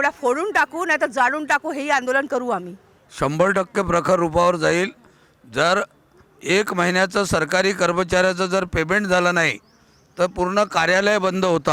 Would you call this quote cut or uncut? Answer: uncut